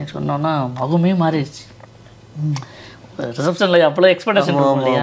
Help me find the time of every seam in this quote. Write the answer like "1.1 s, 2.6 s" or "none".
none

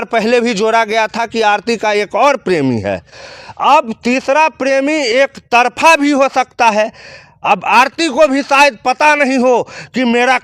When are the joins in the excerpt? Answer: none

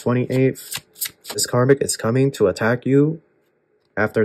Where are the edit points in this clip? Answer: 1.4 s

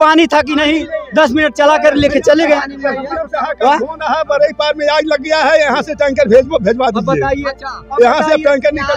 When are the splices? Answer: none

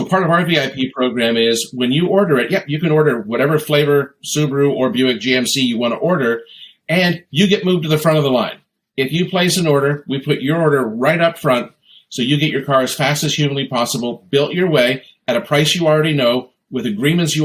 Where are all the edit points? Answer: none

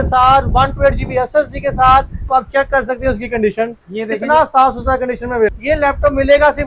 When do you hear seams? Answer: 2.2 s, 5.5 s

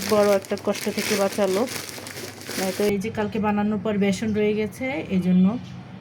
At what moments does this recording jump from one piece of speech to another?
2.9 s

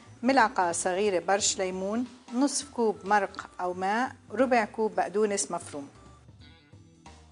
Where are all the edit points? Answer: 6.0 s

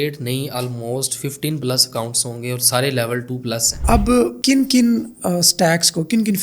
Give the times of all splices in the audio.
3.8 s

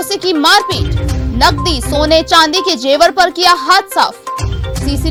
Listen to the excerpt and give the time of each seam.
none

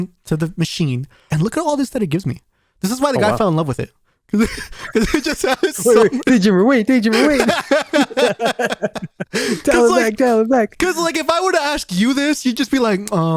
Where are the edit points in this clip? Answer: 1.3 s

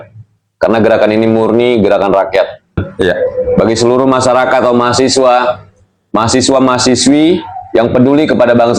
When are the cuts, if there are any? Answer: 2.9 s

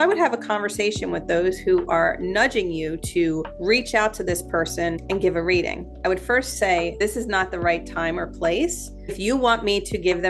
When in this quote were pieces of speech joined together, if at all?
3.5 s, 5.0 s, 6.9 s, 9.2 s

